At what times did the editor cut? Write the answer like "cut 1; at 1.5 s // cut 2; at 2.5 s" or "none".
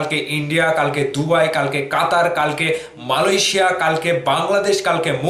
none